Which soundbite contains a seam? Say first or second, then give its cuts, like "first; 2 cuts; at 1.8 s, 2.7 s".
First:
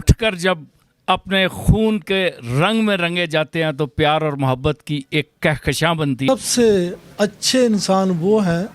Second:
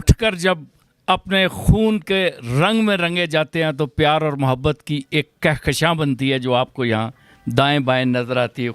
first; 1 cut; at 6.3 s